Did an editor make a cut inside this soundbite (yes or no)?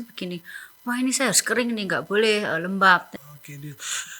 yes